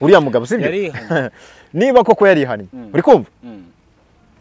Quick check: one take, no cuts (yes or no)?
yes